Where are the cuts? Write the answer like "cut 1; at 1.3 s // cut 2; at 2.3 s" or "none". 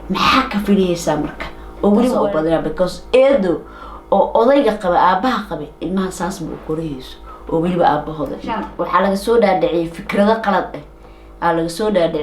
cut 1; at 2.2 s // cut 2; at 8.7 s